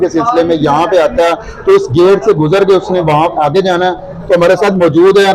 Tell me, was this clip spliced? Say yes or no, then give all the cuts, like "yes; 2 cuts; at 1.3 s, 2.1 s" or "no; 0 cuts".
no; 0 cuts